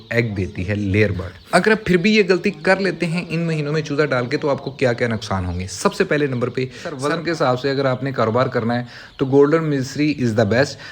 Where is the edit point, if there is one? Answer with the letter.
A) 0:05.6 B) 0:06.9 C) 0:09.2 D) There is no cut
B